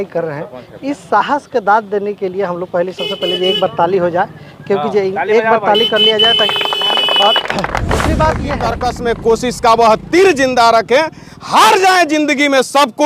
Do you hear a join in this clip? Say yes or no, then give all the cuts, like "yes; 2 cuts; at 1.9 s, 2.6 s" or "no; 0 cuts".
yes; 1 cut; at 8.7 s